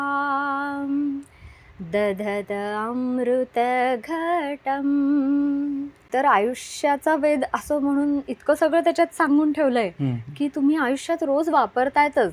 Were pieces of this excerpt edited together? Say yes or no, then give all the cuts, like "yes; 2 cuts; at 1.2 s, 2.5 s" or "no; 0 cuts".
yes; 1 cut; at 6.0 s